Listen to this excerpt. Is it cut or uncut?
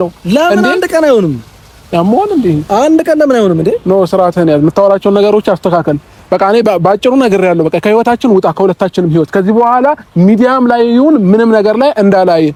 uncut